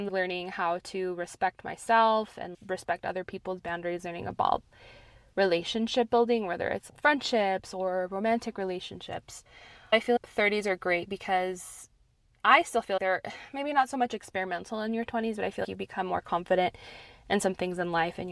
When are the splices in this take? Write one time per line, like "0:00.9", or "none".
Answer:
none

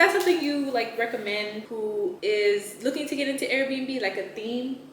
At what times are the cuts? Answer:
0:01.6

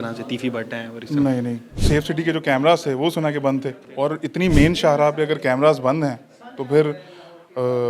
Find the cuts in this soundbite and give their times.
0:01.7
0:03.8

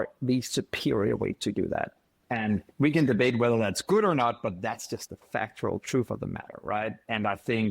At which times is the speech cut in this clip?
0:02.7

